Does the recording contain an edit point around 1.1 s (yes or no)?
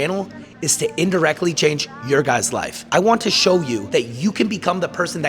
no